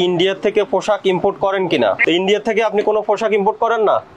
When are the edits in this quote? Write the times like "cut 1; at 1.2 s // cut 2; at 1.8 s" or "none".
none

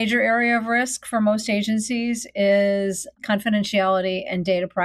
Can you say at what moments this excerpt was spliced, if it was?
cut 1; at 3.1 s

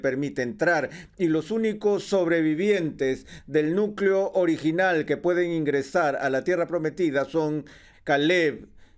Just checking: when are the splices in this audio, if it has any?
cut 1; at 7.9 s

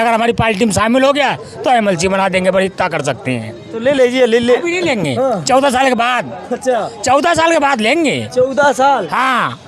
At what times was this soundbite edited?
none

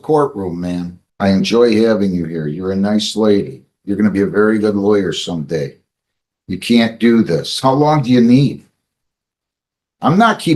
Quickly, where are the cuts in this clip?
cut 1; at 1.0 s

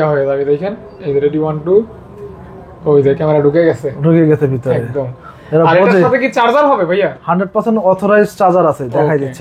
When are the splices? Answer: none

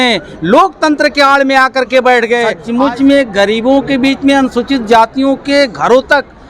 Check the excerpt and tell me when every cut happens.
cut 1; at 2.6 s

